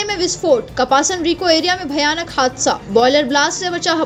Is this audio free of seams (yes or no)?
yes